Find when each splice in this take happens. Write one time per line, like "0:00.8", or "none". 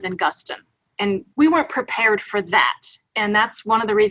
0:01.3